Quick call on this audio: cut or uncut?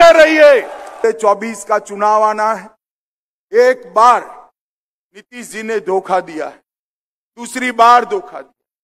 cut